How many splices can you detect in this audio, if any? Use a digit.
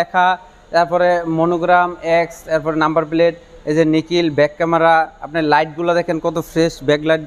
0